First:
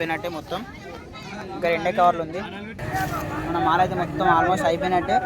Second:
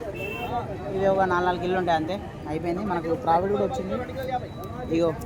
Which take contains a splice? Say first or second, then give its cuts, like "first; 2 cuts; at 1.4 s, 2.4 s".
first; 1 cut; at 2.8 s